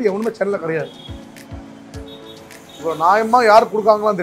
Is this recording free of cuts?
yes; 0 cuts

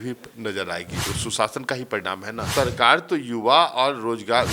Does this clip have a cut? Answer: yes; 2 cuts; at 1.1 s, 2.5 s

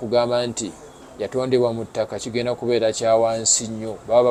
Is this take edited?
no; 0 cuts

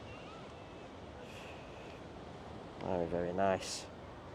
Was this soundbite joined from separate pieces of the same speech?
no; 0 cuts

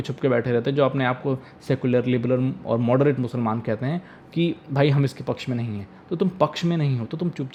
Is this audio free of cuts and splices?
yes; 0 cuts

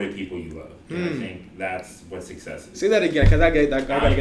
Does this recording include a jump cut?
no; 0 cuts

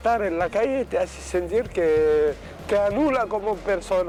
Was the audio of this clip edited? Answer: no; 0 cuts

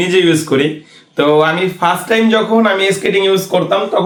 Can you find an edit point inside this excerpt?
no; 0 cuts

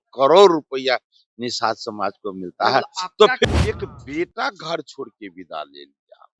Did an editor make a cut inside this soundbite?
yes; 1 cut; at 3.4 s

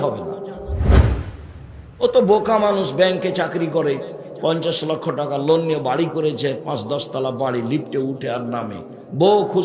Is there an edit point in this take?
no; 0 cuts

